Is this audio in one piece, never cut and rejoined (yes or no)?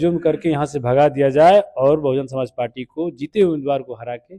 yes